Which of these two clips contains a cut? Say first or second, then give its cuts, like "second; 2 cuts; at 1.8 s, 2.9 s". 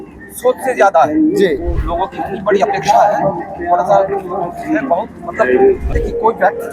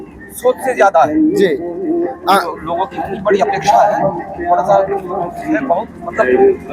first; 2 cuts; at 1.8 s, 5.8 s